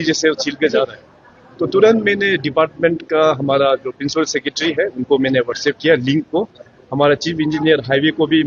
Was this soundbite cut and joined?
no; 0 cuts

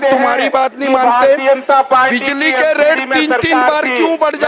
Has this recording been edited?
no; 0 cuts

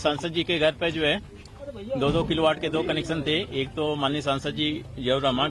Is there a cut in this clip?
yes; 1 cut; at 2.6 s

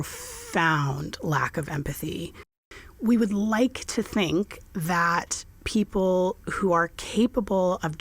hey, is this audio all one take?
no; 1 cut; at 2.6 s

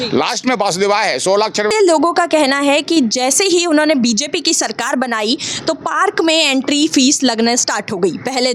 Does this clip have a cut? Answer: yes; 1 cut; at 1.7 s

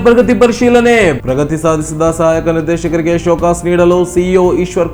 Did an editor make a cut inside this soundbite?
no; 0 cuts

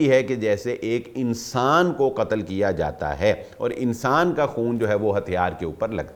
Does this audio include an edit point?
no; 0 cuts

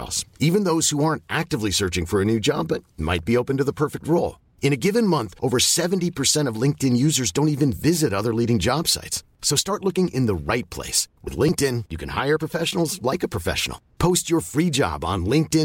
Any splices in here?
no; 0 cuts

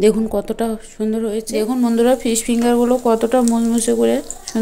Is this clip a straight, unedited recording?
no; 1 cut; at 1.5 s

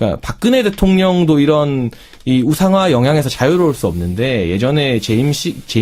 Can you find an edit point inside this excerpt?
yes; 1 cut; at 1.2 s

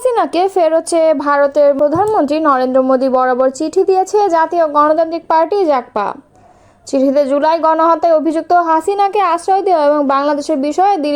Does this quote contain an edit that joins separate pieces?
yes; 1 cut; at 1.8 s

